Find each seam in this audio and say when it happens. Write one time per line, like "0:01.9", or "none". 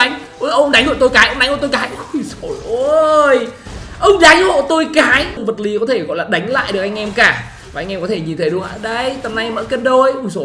0:05.4